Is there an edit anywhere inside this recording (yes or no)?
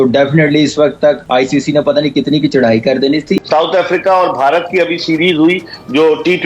yes